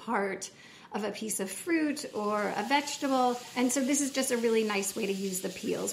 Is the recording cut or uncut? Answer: cut